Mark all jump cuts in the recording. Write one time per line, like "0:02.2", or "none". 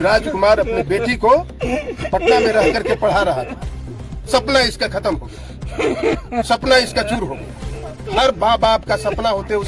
none